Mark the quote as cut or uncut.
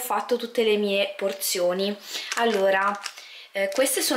uncut